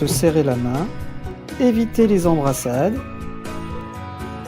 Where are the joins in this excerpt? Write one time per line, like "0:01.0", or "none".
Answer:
0:03.5